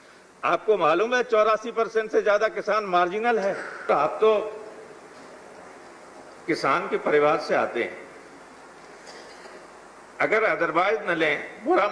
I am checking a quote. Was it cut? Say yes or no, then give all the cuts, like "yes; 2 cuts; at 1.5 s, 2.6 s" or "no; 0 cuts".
yes; 1 cut; at 3.9 s